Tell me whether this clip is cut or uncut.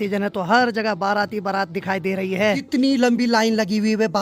cut